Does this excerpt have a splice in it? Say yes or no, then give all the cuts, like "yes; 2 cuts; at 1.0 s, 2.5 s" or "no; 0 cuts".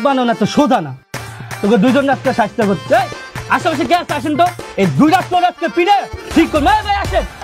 no; 0 cuts